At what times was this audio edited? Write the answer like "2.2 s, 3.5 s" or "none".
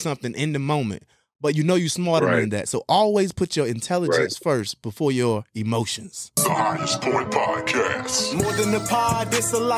6.2 s